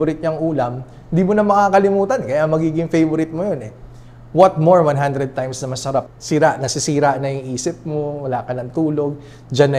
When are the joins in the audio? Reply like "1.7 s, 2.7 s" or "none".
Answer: 6.1 s